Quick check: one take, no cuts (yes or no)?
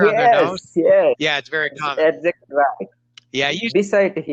yes